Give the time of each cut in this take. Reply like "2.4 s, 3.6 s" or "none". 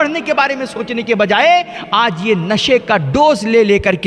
1.8 s